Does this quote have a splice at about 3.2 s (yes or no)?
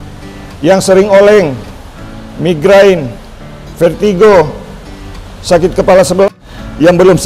no